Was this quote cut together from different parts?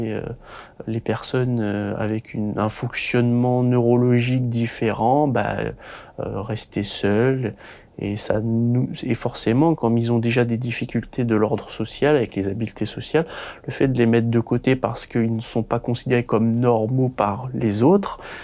no; 0 cuts

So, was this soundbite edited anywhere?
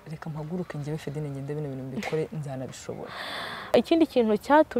yes; 1 cut; at 3.7 s

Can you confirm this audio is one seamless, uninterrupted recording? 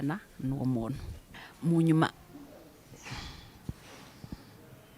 no; 1 cut; at 1.1 s

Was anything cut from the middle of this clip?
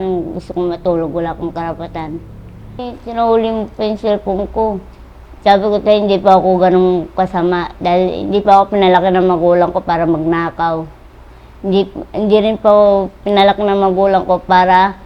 yes; 1 cut; at 2.9 s

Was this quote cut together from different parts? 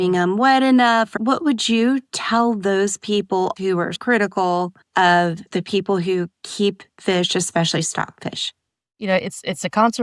yes; 2 cuts; at 1.1 s, 9.1 s

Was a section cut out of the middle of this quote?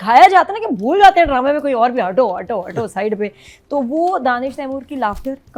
no; 0 cuts

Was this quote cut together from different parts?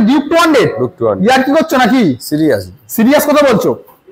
no; 0 cuts

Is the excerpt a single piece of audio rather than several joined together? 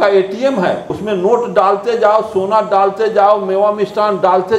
no; 1 cut; at 0.9 s

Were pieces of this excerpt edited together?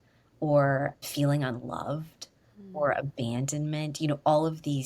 yes; 1 cut; at 1.0 s

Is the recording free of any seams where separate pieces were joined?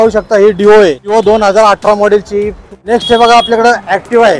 no; 2 cuts; at 1.1 s, 2.6 s

